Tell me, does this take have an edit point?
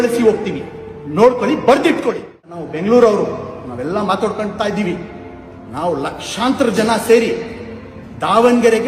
yes; 1 cut; at 2.7 s

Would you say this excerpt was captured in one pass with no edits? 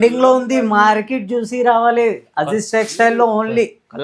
yes; 0 cuts

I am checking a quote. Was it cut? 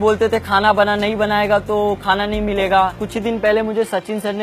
yes; 1 cut; at 3.0 s

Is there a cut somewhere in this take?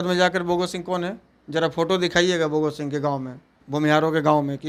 no; 0 cuts

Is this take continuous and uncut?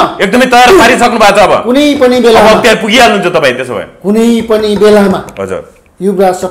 yes; 0 cuts

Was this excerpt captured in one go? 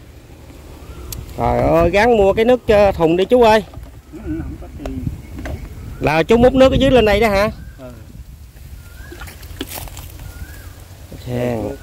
yes; 0 cuts

